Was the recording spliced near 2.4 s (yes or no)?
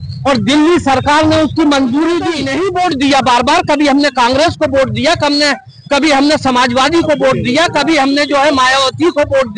yes